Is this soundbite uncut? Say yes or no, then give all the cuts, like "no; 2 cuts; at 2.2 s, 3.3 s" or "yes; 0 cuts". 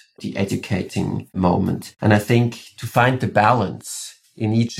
no; 1 cut; at 1.9 s